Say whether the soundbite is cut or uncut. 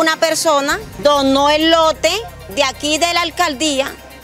cut